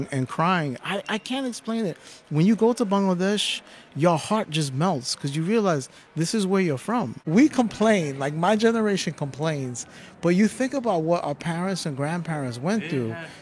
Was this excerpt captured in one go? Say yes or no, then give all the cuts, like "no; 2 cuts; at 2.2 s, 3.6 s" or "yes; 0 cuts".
no; 1 cut; at 7.2 s